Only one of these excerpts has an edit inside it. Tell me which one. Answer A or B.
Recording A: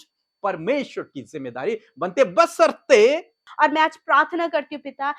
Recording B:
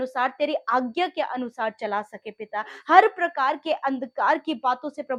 A